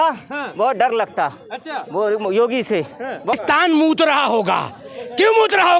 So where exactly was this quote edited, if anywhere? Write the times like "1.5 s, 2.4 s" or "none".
3.4 s